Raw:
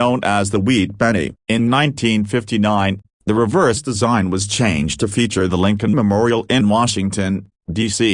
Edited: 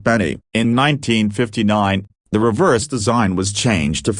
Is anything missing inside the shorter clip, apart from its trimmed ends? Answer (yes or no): no